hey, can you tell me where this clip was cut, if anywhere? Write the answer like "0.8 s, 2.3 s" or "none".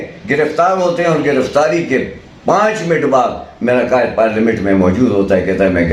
none